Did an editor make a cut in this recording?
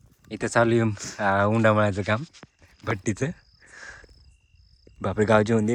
no; 0 cuts

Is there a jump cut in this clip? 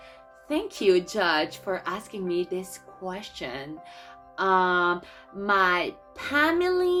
no; 0 cuts

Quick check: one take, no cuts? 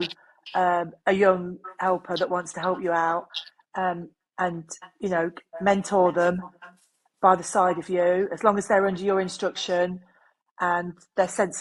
yes; 0 cuts

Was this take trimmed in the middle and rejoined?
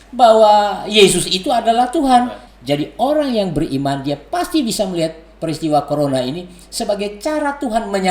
yes; 1 cut; at 2.4 s

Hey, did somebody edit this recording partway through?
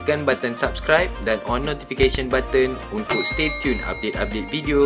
no; 0 cuts

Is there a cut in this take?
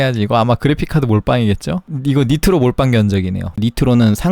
yes; 2 cuts; at 1.9 s, 3.6 s

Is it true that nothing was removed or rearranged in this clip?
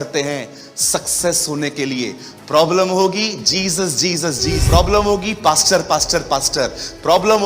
no; 1 cut; at 4.6 s

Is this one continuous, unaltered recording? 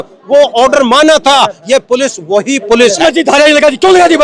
no; 1 cut; at 3.0 s

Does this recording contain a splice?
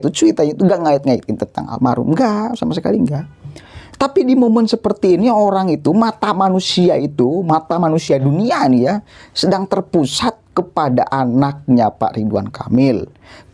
no; 0 cuts

